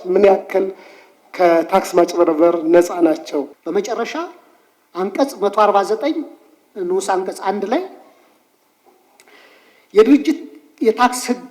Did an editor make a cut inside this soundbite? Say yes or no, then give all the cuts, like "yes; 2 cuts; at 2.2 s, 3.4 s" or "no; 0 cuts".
no; 0 cuts